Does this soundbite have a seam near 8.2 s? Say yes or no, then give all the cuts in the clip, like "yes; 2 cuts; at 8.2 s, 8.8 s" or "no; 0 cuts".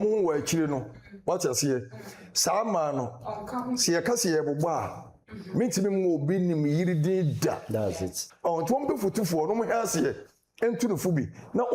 yes; 1 cut; at 8.2 s